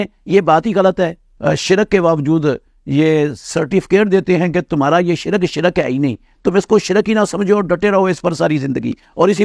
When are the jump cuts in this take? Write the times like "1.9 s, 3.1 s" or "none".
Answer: 1.3 s